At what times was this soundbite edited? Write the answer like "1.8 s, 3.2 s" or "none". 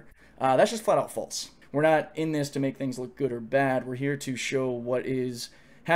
1.5 s

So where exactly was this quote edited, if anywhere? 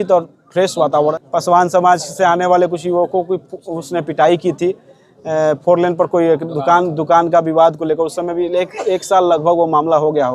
1.2 s

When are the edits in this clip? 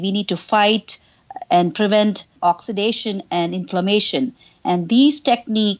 2.3 s

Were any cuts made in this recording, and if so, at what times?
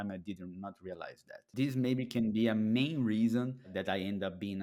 1.5 s, 3.7 s

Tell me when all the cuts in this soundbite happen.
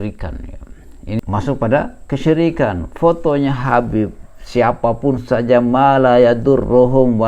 1.2 s

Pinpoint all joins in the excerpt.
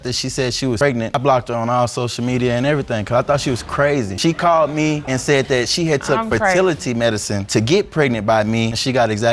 none

